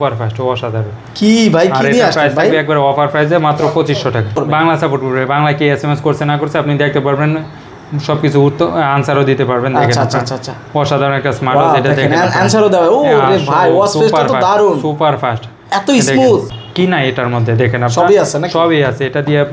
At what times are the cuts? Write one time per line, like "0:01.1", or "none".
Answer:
0:04.3
0:16.5